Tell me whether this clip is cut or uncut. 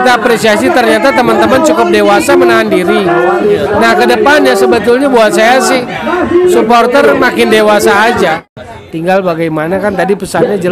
cut